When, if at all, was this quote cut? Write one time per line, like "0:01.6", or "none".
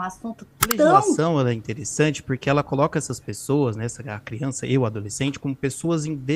0:01.2